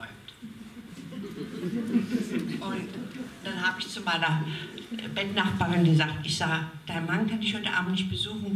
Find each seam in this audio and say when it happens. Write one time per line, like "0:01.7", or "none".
none